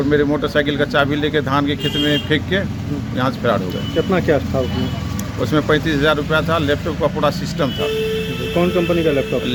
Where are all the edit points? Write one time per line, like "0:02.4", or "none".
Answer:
none

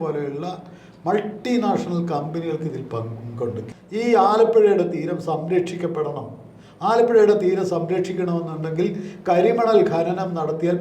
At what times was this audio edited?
0:03.6

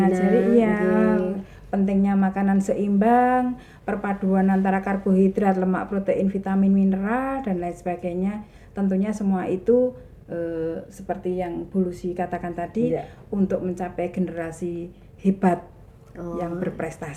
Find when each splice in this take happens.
none

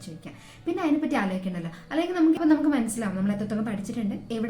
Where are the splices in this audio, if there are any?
0:02.4

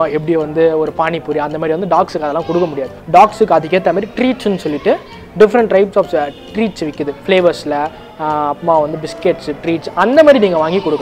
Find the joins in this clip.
0:02.9

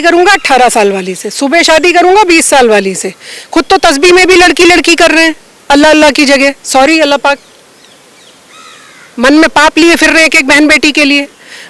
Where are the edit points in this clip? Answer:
none

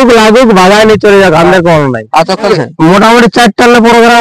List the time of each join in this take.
0:02.5

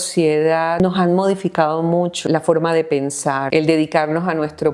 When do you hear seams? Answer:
0:00.8
0:02.2
0:03.5

